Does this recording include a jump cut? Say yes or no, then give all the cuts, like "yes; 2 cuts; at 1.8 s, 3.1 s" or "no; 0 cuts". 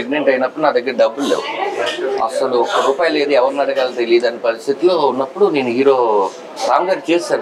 no; 0 cuts